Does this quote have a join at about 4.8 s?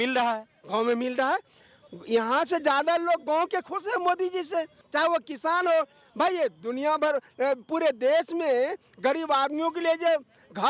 yes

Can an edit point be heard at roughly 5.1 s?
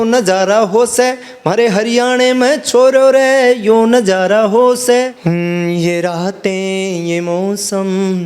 yes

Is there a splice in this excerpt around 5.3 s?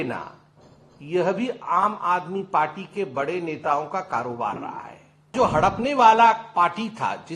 yes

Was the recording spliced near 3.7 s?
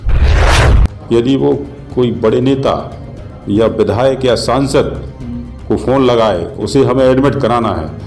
no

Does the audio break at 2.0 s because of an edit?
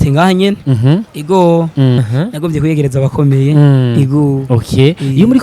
yes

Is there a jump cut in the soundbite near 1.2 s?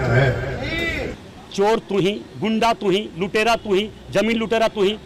yes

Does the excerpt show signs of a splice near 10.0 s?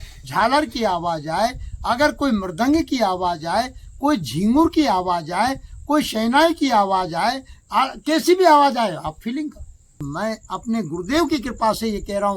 yes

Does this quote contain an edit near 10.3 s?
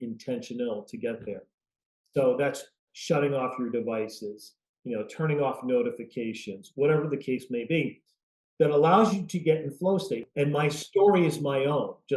yes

